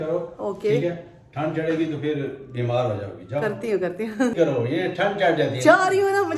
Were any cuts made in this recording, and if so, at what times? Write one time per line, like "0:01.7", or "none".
none